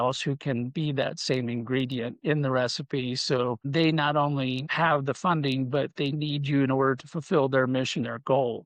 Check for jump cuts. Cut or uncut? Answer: cut